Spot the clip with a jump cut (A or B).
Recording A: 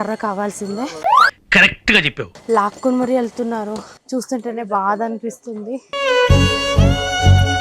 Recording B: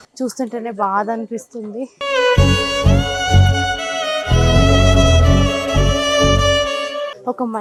A